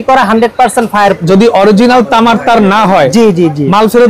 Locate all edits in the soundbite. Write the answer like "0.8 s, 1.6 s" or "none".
1.2 s